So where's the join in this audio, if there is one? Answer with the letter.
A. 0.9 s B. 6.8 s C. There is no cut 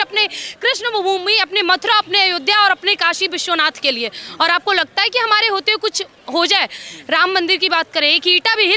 C